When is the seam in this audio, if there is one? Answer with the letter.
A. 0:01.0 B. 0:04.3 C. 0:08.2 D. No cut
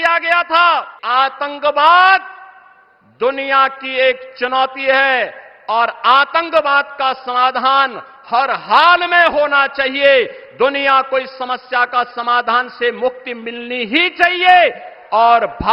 A